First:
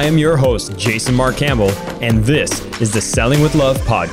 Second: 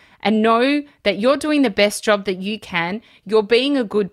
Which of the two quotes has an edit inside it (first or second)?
second